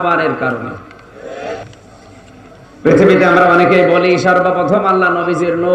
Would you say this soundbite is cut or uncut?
cut